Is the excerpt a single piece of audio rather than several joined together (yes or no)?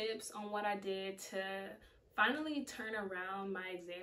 yes